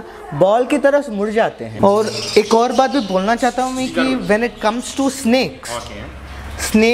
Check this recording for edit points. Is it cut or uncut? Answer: cut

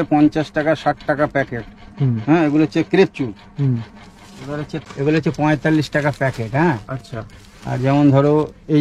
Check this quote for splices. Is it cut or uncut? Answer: cut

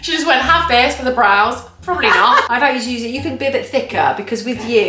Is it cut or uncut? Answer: cut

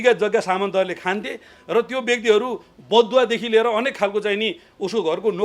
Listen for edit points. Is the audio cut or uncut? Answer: uncut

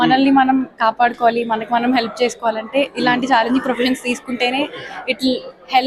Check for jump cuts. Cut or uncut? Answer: uncut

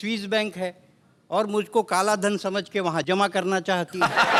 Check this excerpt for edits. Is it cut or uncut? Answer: uncut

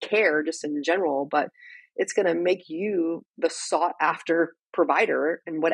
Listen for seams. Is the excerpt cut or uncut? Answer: uncut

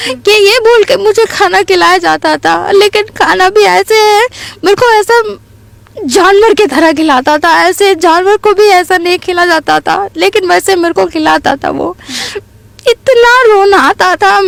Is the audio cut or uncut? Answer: uncut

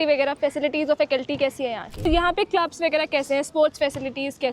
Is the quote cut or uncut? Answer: cut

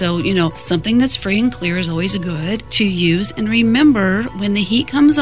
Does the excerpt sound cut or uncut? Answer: uncut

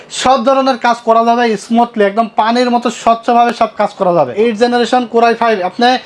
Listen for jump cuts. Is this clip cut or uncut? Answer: cut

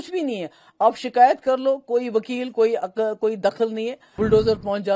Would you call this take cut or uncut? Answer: cut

